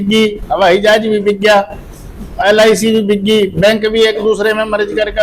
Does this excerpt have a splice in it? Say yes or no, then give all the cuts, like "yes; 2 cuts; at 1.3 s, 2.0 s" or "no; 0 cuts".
no; 0 cuts